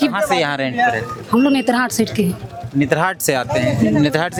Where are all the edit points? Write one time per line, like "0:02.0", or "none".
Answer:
none